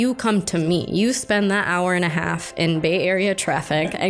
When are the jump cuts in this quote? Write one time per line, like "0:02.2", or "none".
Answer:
none